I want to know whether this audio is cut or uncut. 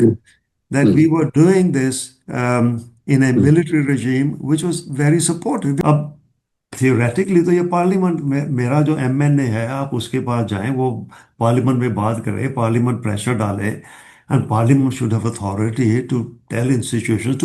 cut